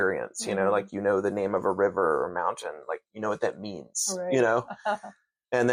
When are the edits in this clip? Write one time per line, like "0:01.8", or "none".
none

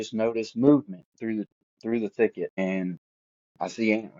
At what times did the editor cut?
0:02.9

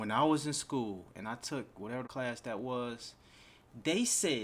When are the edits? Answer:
0:02.1

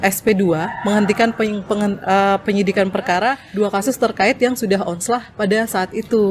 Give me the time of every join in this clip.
0:03.4
0:05.3

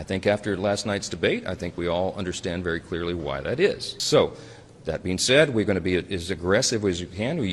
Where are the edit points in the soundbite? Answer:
0:03.9

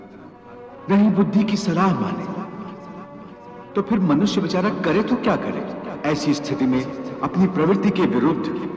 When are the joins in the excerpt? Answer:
0:05.9

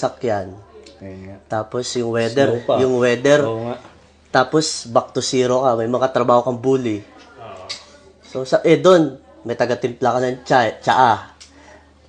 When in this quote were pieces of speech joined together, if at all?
none

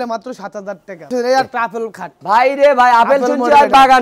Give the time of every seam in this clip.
0:00.9

